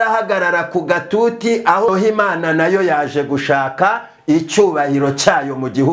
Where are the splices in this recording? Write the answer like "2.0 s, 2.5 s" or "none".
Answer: 1.9 s